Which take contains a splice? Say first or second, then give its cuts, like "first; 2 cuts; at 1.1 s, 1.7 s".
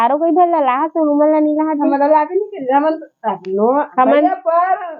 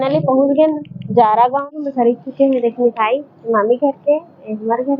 second; 1 cut; at 1.7 s